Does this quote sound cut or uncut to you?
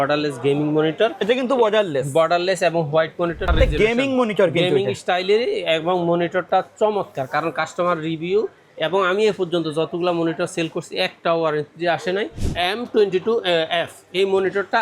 cut